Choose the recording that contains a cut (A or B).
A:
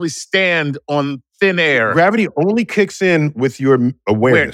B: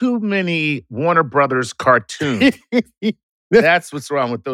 B